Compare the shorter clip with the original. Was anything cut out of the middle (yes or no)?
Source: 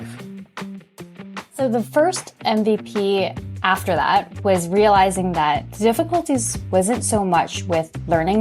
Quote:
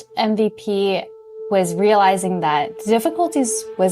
yes